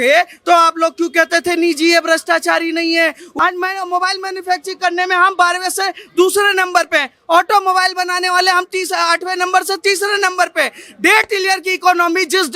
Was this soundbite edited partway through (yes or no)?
yes